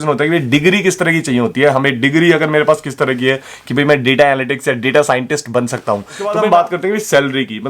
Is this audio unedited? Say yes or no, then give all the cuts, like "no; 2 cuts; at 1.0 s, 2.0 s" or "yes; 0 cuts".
no; 1 cut; at 6.3 s